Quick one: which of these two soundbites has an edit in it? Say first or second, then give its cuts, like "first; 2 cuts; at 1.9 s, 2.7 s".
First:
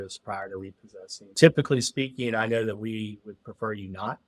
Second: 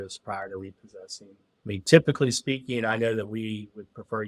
first; 1 cut; at 1.3 s